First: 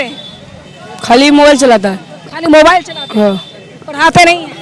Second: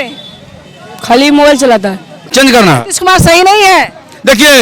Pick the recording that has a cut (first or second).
second